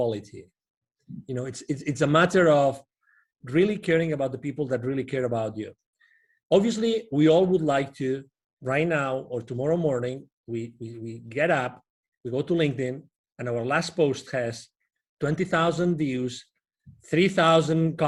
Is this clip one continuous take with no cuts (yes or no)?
yes